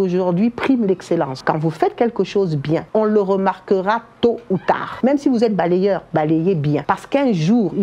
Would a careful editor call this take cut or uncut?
cut